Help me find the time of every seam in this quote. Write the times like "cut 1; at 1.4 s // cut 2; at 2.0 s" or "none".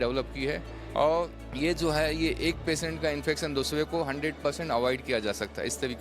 cut 1; at 1.4 s

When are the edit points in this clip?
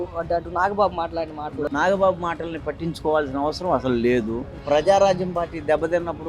cut 1; at 1.7 s // cut 2; at 4.6 s

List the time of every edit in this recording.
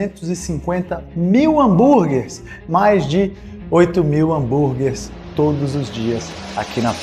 none

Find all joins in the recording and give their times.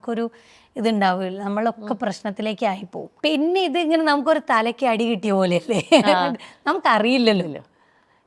cut 1; at 3.0 s

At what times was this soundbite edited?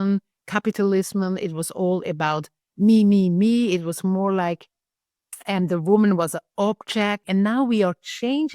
cut 1; at 7.2 s

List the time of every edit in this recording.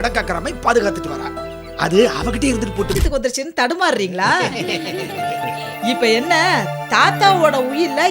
cut 1; at 2.9 s

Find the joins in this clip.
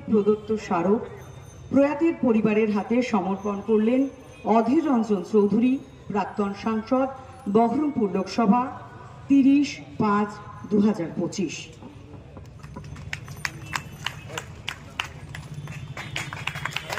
none

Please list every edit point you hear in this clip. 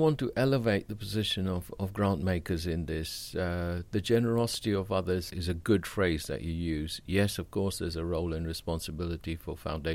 none

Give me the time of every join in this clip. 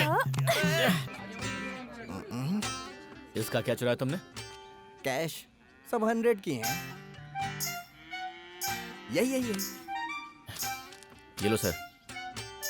cut 1; at 1.0 s

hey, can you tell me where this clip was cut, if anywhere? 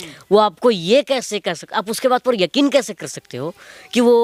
none

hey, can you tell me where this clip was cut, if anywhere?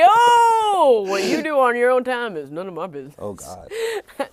none

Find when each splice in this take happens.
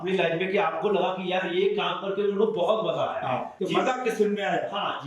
cut 1; at 3.5 s

